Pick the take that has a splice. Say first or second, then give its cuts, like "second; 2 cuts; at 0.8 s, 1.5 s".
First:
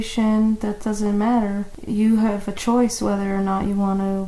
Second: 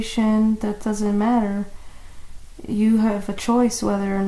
first; 1 cut; at 1.7 s